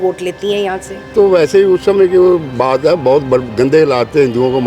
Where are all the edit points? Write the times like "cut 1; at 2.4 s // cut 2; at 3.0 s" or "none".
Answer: cut 1; at 1.1 s